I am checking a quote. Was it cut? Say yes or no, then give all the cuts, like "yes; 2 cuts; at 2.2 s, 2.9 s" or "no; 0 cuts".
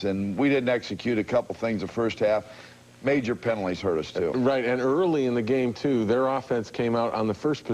yes; 1 cut; at 6.8 s